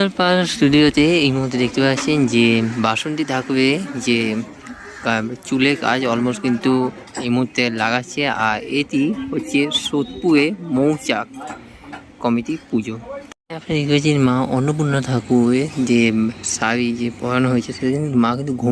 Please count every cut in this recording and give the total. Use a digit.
1